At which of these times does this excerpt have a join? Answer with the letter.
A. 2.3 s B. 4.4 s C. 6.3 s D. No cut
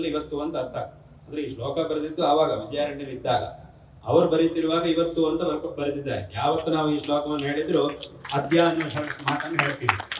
C